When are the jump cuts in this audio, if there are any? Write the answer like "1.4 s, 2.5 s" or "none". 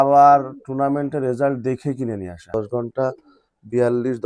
2.5 s